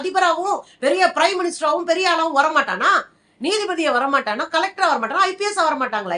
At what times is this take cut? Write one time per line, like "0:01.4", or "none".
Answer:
none